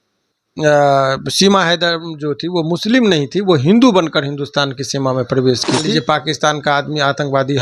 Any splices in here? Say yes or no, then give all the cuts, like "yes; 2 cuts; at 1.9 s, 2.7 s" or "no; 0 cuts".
yes; 1 cut; at 5.8 s